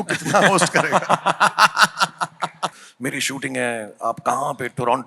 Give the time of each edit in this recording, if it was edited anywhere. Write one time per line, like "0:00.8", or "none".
0:02.8